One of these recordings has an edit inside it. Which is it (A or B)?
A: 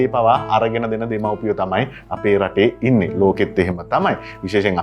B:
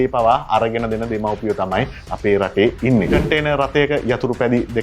B